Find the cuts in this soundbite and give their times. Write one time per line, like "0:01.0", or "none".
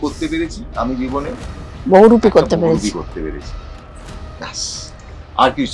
none